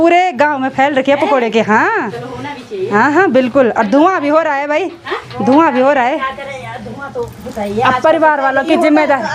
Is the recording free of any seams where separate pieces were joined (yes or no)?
yes